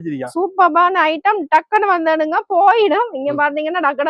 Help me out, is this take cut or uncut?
uncut